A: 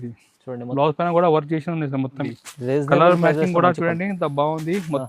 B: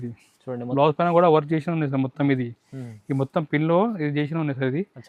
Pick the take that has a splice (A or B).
A